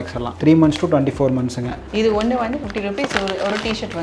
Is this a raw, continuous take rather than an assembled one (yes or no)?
no